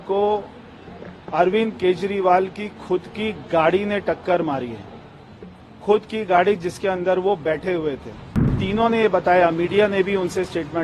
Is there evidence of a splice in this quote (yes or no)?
yes